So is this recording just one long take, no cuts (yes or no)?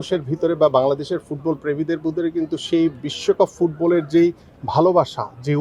yes